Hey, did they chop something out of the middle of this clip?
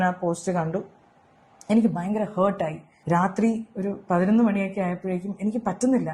yes; 1 cut; at 2.9 s

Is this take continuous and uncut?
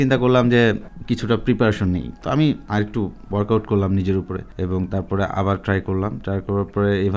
no; 3 cuts; at 0.9 s, 2.7 s, 4.4 s

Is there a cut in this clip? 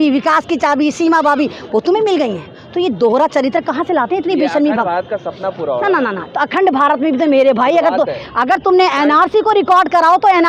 no; 0 cuts

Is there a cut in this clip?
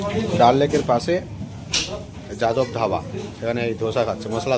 no; 0 cuts

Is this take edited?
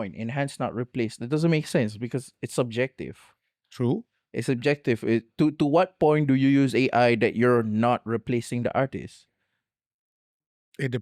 no; 0 cuts

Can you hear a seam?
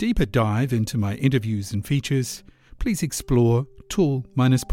no; 0 cuts

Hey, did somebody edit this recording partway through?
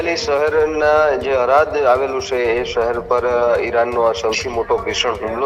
no; 0 cuts

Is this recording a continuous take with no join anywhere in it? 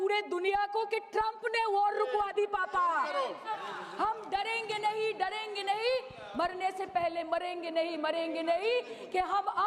no; 1 cut; at 3.5 s

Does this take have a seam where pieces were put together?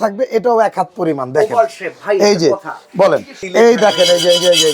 yes; 1 cut; at 3.4 s

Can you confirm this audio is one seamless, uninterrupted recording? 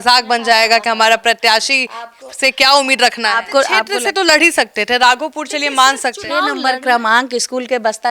no; 2 cuts; at 3.8 s, 6.5 s

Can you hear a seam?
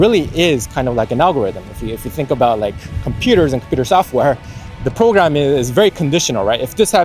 no; 0 cuts

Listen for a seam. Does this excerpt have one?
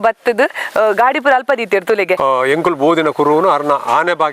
yes; 1 cut; at 2.2 s

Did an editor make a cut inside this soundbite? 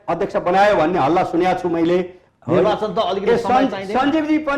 yes; 1 cut; at 2.2 s

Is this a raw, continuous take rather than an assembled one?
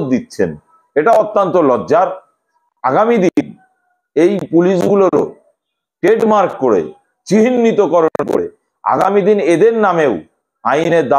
yes; 0 cuts

